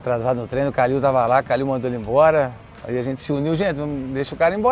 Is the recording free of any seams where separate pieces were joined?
yes; 0 cuts

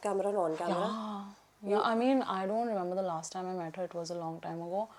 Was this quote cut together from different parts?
no; 0 cuts

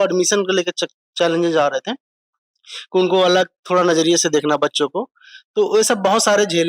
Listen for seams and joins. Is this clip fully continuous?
yes; 0 cuts

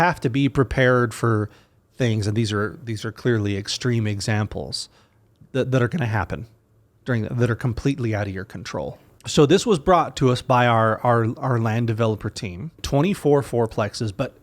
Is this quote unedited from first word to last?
no; 2 cuts; at 9.1 s, 12.8 s

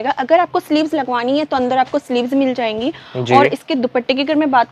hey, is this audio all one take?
yes; 0 cuts

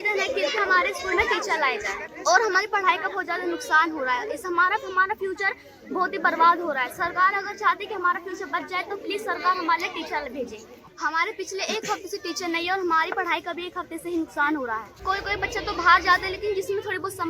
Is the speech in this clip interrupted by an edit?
no; 0 cuts

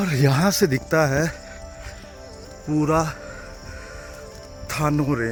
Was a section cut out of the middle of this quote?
no; 0 cuts

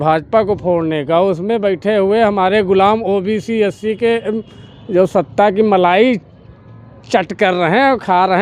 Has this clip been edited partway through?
no; 0 cuts

